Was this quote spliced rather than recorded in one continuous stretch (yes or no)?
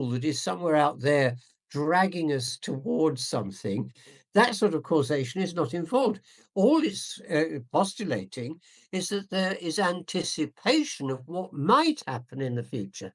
no